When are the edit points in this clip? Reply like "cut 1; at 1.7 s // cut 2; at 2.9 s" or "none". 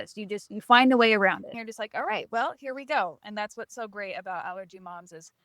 cut 1; at 1.4 s